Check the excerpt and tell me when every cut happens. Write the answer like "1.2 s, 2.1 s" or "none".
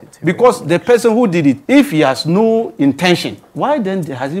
1.6 s, 3.4 s

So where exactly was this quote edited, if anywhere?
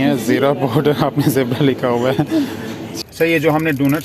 2.9 s

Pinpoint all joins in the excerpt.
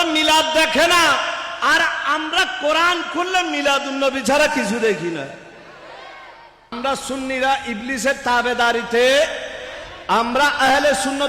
6.7 s

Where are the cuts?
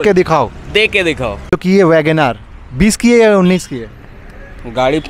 1.5 s

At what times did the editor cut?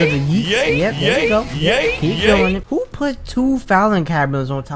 2.6 s

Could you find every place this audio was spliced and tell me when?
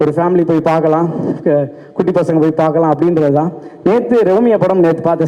none

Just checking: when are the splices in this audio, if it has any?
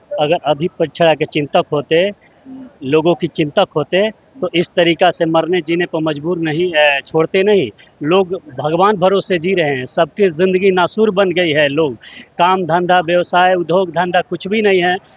none

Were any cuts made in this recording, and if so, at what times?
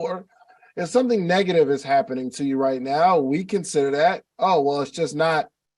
none

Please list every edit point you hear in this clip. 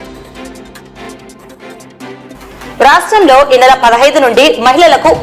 1.3 s, 2.3 s

